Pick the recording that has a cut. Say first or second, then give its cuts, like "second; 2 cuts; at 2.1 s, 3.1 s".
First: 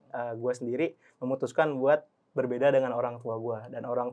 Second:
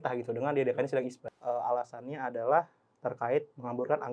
second; 1 cut; at 1.3 s